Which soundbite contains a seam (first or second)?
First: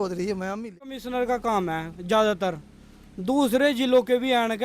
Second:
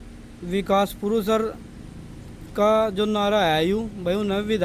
first